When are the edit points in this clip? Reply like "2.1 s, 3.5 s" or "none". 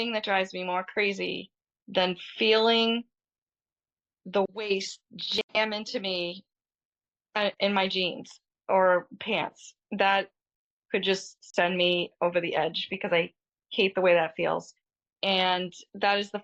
none